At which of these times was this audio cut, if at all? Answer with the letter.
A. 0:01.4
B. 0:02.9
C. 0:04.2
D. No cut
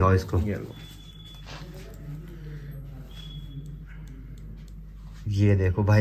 D